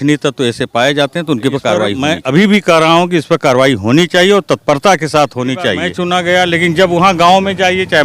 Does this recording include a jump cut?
yes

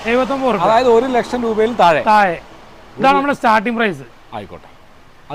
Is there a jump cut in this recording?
no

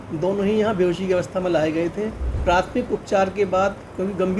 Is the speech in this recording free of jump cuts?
no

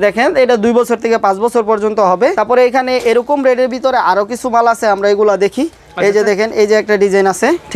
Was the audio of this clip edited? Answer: yes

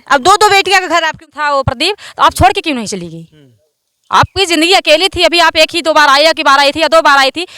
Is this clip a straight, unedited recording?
no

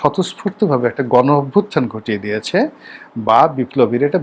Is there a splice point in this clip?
no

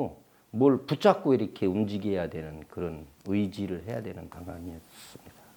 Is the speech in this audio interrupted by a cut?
no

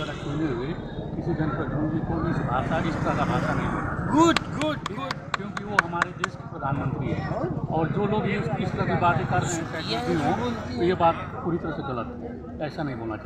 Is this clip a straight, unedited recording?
yes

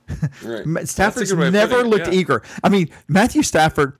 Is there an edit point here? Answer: no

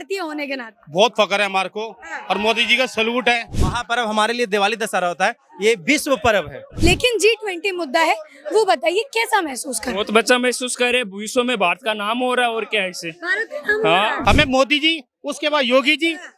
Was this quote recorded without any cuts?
no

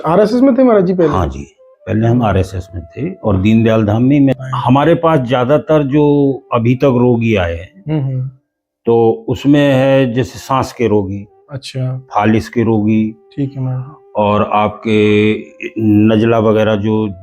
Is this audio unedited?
no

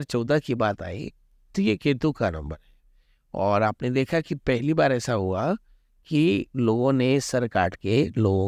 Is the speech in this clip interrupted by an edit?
no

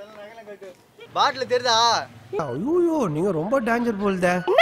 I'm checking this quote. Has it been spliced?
yes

